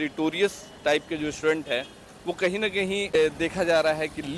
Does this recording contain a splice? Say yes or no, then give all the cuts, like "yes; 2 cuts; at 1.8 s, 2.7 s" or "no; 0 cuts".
yes; 1 cut; at 3.2 s